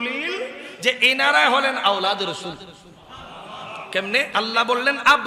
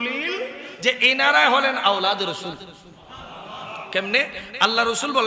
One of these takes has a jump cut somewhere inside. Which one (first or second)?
first